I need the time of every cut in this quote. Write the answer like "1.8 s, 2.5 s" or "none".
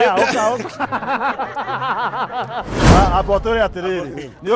2.9 s